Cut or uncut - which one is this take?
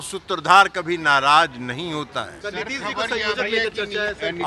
cut